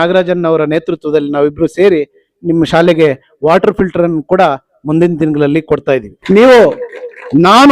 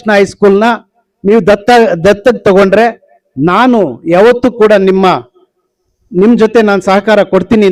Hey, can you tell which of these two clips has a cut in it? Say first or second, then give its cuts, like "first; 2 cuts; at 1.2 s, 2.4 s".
first; 1 cut; at 6.1 s